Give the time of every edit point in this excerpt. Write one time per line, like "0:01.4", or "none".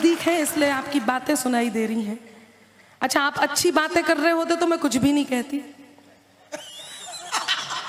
none